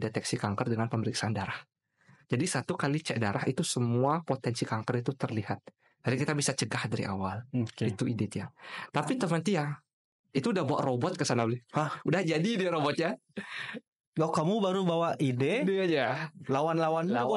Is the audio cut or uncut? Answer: uncut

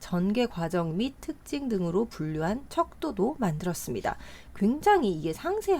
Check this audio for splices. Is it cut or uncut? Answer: uncut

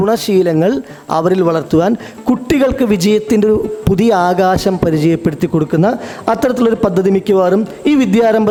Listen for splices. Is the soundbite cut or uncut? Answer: uncut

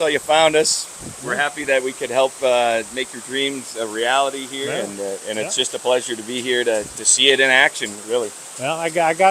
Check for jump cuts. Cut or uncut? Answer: uncut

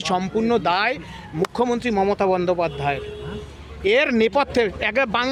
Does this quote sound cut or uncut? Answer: uncut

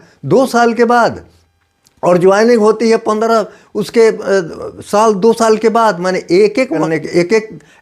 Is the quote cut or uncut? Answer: cut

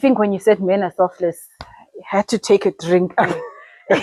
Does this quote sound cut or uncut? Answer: uncut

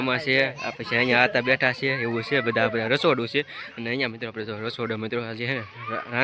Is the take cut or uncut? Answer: uncut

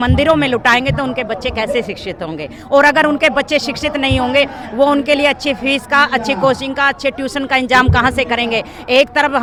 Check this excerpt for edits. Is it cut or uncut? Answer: uncut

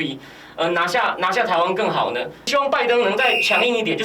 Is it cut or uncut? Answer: cut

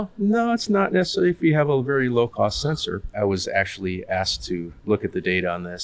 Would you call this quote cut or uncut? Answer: cut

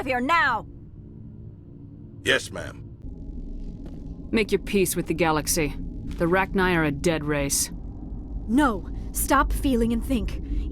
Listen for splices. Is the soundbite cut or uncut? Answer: cut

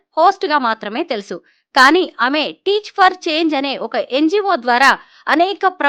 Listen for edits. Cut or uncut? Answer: uncut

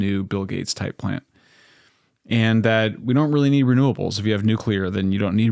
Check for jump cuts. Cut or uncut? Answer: uncut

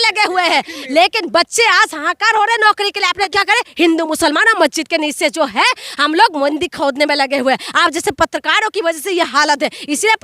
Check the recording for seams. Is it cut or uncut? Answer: cut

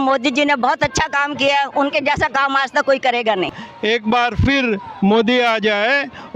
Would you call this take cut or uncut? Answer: cut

